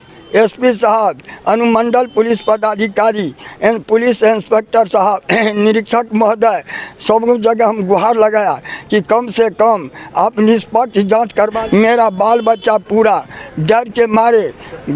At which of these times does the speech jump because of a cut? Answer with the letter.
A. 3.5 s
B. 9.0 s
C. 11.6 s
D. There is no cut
C